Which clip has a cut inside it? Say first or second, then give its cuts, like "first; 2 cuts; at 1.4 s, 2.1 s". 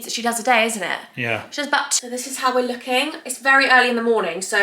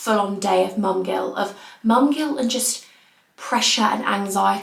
first; 1 cut; at 2.0 s